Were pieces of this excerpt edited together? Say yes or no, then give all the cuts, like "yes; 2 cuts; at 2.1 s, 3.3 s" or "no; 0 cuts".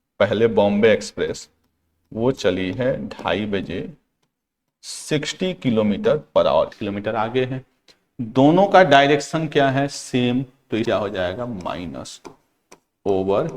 yes; 2 cuts; at 6.8 s, 10.9 s